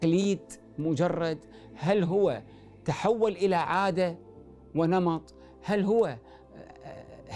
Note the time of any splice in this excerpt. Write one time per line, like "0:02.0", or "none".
none